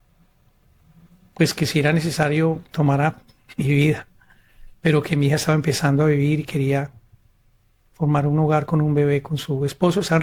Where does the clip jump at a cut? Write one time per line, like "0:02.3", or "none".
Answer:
none